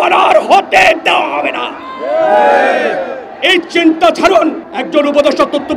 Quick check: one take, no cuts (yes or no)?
no